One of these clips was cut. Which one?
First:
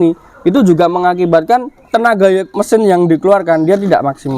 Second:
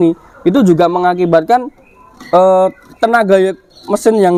first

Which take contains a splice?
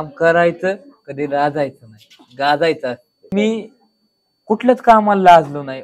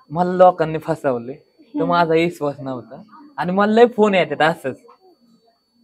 first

